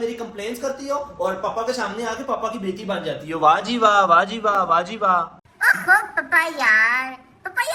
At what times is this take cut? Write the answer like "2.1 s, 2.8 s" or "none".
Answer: none